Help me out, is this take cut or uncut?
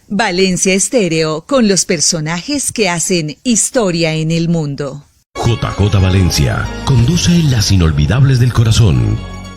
cut